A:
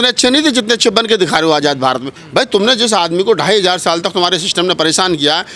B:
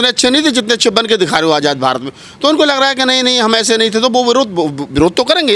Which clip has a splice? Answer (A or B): A